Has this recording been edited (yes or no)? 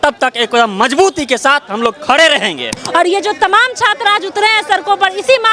yes